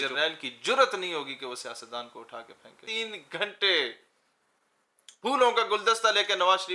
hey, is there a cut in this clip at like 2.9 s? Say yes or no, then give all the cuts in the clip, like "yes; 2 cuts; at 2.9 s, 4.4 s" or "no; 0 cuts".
yes; 1 cut; at 2.9 s